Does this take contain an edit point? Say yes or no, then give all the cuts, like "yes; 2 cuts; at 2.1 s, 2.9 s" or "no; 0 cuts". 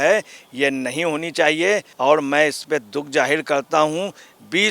yes; 1 cut; at 1.9 s